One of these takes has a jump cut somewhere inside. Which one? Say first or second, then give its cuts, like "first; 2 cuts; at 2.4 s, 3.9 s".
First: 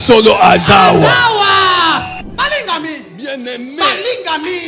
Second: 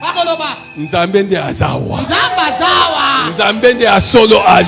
first; 1 cut; at 2.1 s